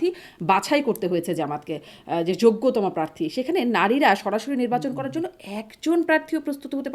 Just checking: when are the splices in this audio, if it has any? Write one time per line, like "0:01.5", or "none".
none